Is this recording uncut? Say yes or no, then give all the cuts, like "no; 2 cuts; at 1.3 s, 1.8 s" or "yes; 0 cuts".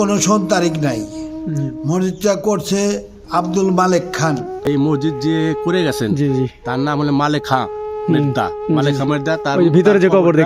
no; 1 cut; at 4.6 s